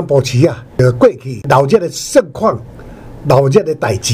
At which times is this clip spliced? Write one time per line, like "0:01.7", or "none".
0:00.8
0:01.5